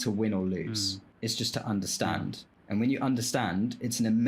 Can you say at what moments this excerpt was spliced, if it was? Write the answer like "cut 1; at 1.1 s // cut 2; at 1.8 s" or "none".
cut 1; at 1.0 s // cut 2; at 2.5 s